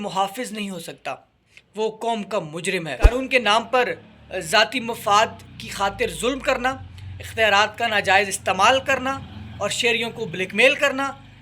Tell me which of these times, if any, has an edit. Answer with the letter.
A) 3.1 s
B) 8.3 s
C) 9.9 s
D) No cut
A